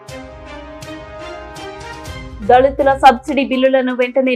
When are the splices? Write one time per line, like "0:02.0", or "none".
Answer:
0:00.9
0:02.3